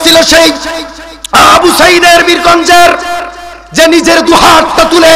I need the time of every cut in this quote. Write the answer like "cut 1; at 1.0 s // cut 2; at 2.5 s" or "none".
none